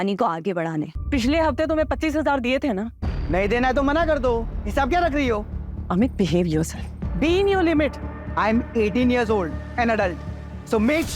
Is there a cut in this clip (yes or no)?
yes